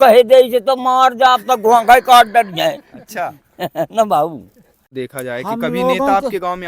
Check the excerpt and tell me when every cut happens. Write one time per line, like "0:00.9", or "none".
0:04.9